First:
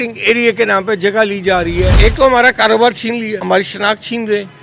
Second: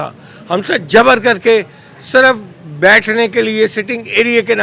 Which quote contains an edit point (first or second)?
first